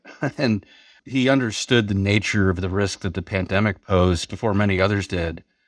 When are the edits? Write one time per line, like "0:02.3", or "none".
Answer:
0:00.9
0:03.8